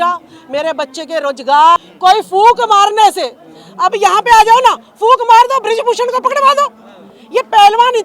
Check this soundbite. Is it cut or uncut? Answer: cut